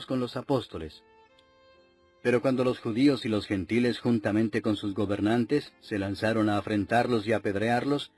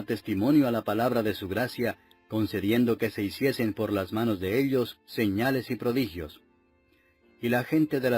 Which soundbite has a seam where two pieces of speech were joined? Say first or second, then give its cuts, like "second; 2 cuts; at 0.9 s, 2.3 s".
second; 1 cut; at 4.4 s